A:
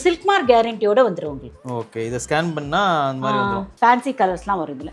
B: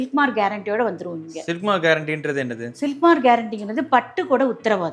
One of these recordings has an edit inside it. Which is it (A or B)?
A